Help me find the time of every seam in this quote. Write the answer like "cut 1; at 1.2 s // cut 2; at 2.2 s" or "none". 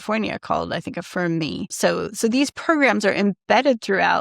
cut 1; at 1.7 s